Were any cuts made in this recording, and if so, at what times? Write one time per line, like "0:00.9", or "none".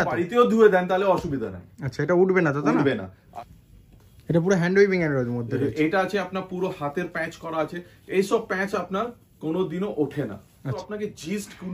0:03.2
0:10.8